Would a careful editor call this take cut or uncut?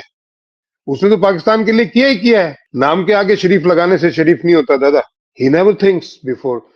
cut